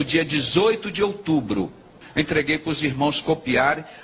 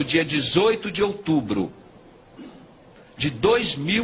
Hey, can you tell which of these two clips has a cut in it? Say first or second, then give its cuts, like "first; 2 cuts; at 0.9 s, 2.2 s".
first; 1 cut; at 2.0 s